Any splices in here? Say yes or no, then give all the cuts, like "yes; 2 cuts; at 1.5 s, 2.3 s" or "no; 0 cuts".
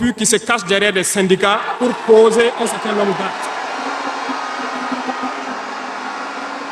no; 0 cuts